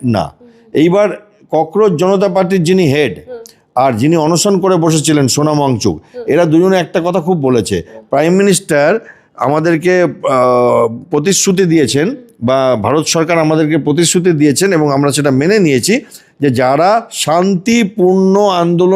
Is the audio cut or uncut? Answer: uncut